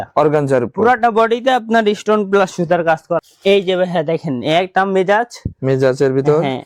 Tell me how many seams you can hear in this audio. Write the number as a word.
one